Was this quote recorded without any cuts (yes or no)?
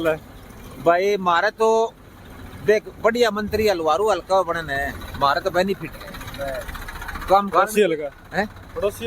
no